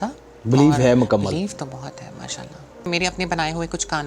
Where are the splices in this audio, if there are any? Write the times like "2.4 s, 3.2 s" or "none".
2.8 s